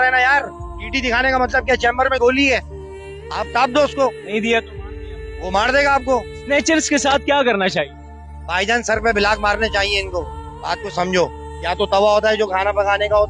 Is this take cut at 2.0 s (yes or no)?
no